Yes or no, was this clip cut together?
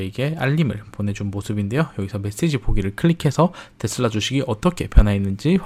no